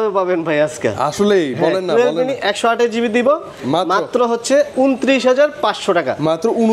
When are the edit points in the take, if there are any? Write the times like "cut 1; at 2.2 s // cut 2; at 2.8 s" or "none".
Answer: none

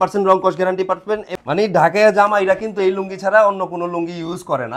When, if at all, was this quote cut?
cut 1; at 1.3 s

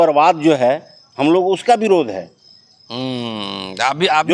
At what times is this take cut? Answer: none

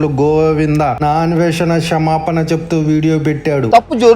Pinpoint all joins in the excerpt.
cut 1; at 1.0 s

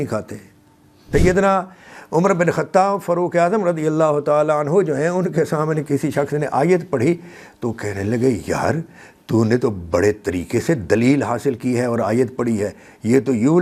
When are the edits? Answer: cut 1; at 1.0 s

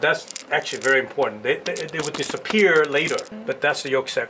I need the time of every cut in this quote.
cut 1; at 3.3 s

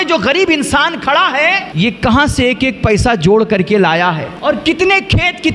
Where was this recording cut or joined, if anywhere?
cut 1; at 1.7 s // cut 2; at 4.3 s

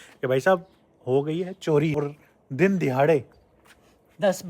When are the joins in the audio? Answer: cut 1; at 1.9 s

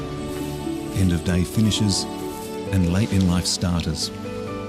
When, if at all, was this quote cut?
cut 1; at 2.1 s

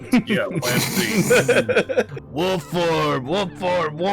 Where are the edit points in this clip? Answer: cut 1; at 2.2 s

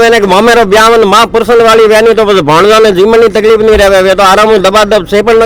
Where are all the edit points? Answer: none

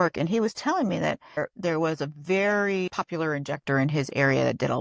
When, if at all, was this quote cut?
cut 1; at 1.4 s // cut 2; at 2.9 s

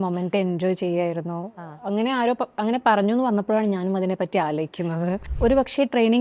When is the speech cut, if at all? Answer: cut 1; at 5.3 s

